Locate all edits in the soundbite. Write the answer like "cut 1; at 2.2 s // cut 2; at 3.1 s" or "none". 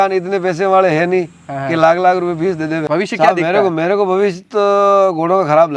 cut 1; at 2.8 s